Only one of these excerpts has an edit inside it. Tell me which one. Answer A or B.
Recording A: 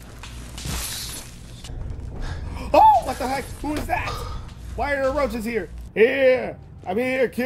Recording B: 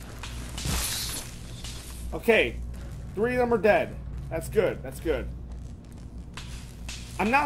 A